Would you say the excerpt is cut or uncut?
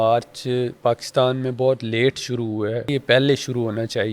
cut